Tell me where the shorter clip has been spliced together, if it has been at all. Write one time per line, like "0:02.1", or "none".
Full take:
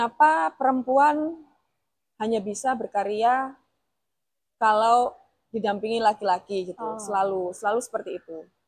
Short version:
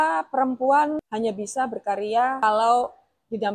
0:01.1
0:02.4